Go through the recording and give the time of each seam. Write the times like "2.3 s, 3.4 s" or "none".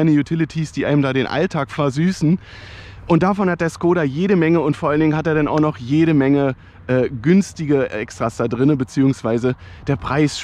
none